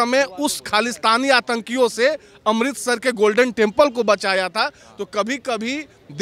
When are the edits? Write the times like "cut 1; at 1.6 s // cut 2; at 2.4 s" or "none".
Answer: none